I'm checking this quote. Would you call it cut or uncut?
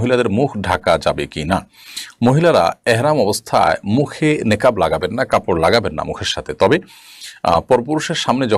uncut